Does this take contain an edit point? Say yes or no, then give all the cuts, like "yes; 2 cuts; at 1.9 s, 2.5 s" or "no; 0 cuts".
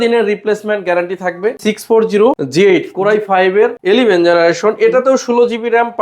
yes; 2 cuts; at 1.9 s, 3.8 s